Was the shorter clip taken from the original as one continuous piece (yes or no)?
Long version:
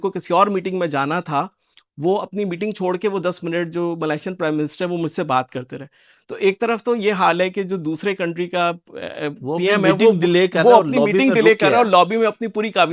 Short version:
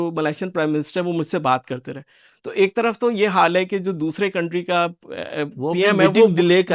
yes